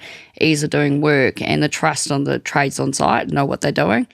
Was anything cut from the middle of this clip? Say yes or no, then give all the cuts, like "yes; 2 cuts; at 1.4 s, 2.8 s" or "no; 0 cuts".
no; 0 cuts